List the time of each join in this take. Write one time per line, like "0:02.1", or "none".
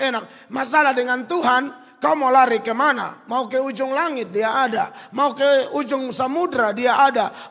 none